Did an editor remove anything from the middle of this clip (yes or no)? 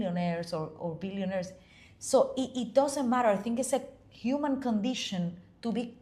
no